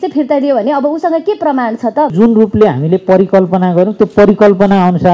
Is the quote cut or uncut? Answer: cut